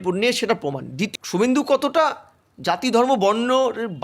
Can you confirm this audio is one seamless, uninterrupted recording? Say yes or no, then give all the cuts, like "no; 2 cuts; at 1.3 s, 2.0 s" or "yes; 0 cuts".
no; 1 cut; at 1.1 s